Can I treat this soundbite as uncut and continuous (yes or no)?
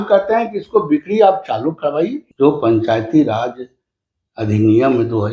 no